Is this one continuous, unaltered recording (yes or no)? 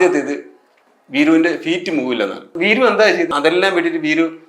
no